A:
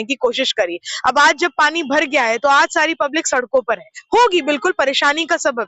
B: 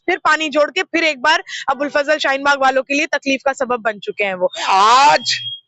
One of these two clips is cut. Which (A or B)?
B